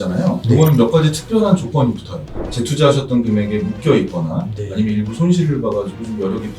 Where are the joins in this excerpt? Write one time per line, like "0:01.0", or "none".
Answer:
0:02.4